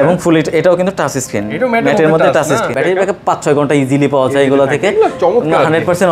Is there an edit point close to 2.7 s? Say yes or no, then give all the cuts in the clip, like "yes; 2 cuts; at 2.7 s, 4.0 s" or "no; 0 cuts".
yes; 1 cut; at 2.7 s